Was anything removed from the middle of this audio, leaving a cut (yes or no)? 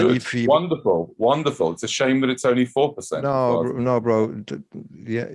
no